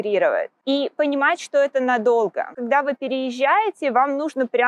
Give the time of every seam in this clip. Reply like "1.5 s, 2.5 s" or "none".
2.6 s